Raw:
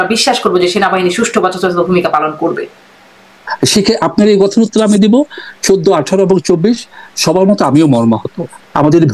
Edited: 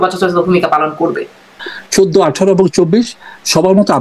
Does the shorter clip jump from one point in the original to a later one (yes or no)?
yes